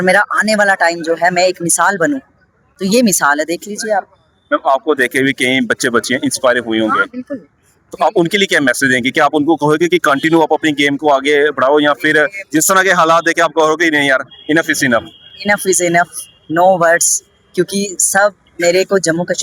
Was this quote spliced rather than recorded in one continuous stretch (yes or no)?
no